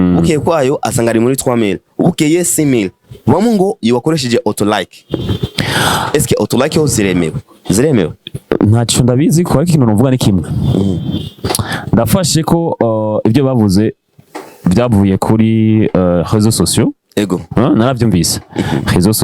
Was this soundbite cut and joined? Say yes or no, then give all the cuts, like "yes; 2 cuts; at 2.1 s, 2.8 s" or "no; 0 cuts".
no; 0 cuts